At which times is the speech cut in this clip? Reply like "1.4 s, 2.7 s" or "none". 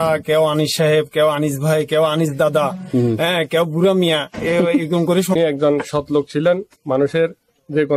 5.4 s